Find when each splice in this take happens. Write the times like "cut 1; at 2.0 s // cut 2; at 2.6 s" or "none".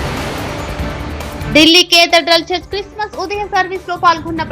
cut 1; at 1.4 s